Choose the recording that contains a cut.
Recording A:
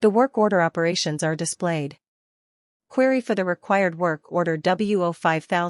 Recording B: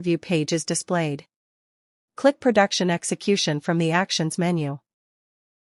A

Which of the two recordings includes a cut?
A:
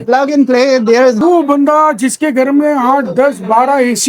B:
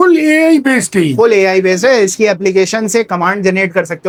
A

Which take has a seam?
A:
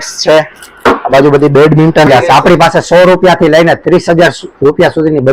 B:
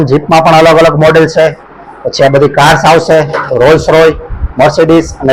A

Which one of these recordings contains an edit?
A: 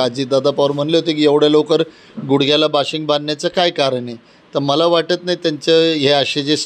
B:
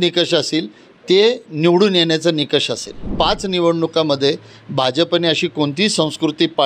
B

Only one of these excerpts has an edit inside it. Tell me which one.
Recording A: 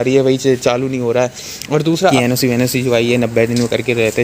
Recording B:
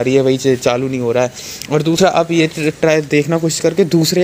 A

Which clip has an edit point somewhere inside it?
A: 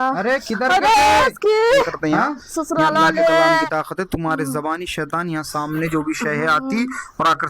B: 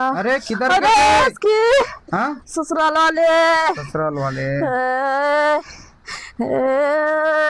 A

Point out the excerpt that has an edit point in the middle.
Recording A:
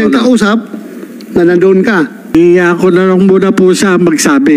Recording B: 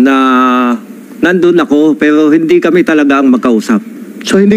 A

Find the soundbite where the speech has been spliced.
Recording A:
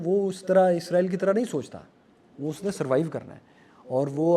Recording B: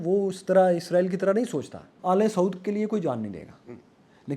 B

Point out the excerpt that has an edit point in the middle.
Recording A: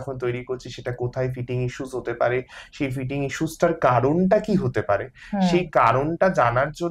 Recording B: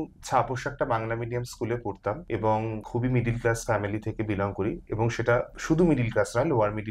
B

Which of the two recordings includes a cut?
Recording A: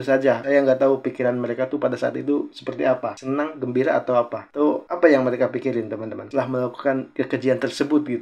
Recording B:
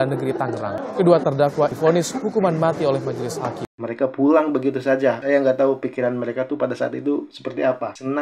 B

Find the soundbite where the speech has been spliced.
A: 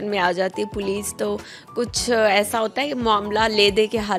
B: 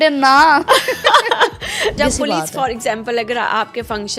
B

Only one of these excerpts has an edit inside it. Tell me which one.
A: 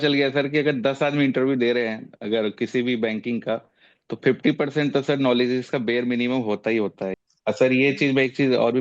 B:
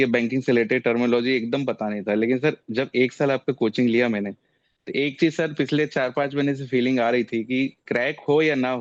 A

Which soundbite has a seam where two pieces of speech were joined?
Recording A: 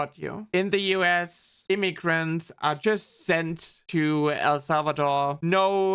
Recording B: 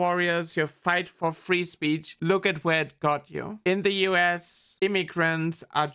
B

